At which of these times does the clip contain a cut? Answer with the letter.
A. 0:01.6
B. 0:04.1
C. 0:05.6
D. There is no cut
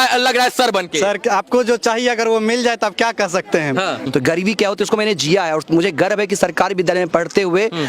B